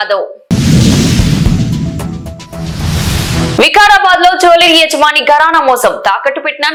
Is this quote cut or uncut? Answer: uncut